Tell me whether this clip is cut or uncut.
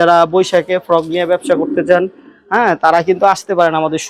uncut